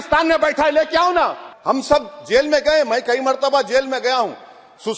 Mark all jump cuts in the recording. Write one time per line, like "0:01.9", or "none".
0:01.5